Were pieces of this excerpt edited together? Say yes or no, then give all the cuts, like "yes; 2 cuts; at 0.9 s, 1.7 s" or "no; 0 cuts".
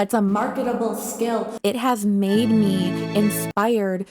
yes; 1 cut; at 1.5 s